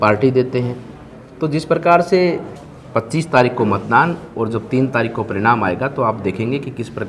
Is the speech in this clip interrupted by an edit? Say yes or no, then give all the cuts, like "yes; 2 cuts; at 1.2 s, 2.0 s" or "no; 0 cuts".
yes; 1 cut; at 2.5 s